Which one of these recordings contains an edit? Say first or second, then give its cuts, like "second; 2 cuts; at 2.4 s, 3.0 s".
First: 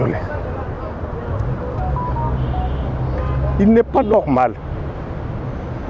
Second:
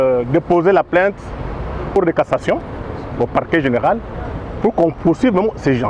second; 1 cut; at 1.9 s